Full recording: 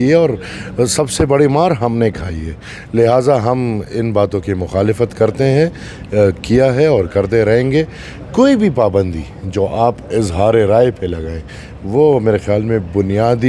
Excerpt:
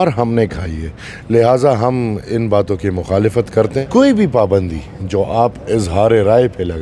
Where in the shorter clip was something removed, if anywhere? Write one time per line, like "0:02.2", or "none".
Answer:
0:03.8